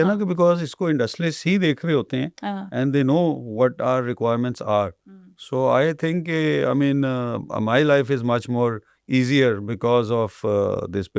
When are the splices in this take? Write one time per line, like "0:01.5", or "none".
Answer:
none